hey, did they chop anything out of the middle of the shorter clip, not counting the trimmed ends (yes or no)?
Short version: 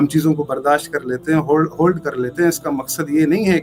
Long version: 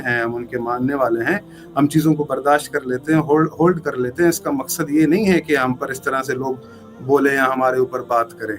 no